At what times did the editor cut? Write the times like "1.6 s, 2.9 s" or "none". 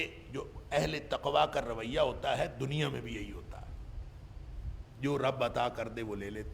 none